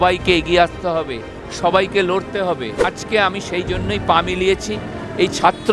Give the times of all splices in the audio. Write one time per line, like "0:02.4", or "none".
0:02.9